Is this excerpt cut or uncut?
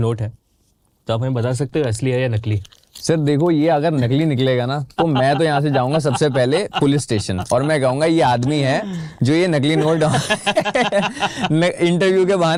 uncut